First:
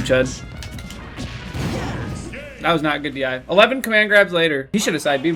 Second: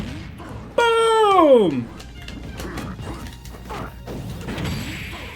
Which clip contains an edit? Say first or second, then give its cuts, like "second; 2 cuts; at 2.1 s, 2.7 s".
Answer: second; 1 cut; at 2.1 s